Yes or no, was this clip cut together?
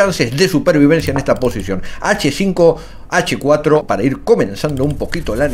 yes